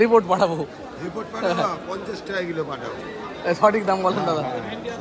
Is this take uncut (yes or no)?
yes